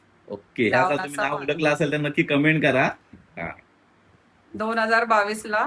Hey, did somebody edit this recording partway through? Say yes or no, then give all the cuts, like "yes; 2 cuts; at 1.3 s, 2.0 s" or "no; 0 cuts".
no; 0 cuts